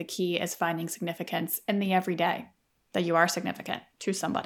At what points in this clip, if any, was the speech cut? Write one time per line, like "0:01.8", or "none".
0:02.6